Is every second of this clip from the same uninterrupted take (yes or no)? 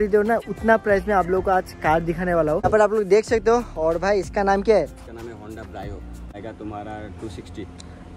no